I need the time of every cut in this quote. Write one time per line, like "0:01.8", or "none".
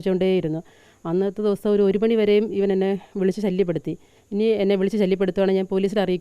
0:04.1